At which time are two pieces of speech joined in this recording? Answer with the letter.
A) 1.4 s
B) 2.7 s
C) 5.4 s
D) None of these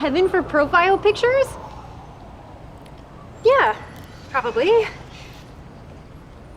A